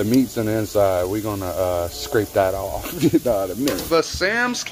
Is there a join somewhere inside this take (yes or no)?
yes